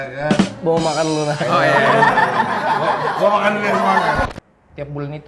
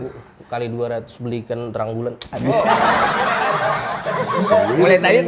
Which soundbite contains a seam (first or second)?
first